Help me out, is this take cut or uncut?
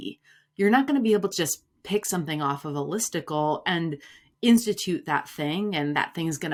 uncut